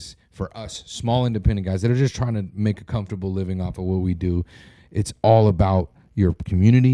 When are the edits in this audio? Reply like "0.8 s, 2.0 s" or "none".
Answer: none